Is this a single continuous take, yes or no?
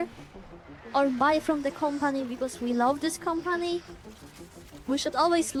yes